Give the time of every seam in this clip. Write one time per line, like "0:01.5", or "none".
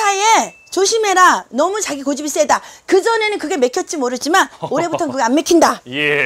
none

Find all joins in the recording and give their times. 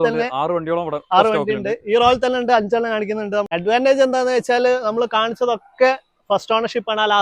0:03.5

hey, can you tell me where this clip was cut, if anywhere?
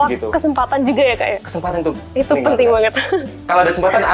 none

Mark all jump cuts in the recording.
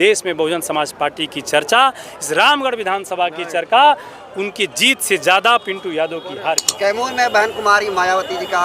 0:06.7

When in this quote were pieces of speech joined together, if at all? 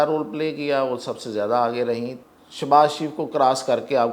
0:02.2

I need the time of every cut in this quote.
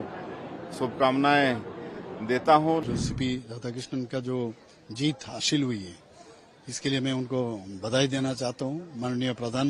0:02.8

